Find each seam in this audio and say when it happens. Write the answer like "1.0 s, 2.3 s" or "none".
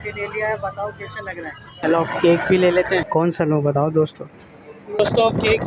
1.7 s, 3.1 s, 5.0 s